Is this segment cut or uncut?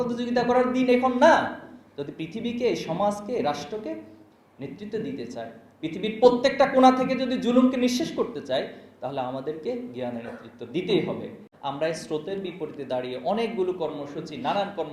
cut